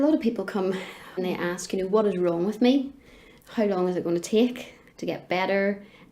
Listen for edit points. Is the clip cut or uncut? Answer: cut